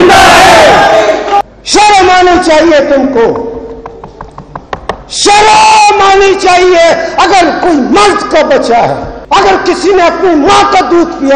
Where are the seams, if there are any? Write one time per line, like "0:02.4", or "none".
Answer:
0:01.4
0:09.1